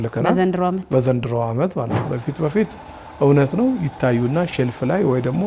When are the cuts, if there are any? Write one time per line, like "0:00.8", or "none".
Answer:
0:02.0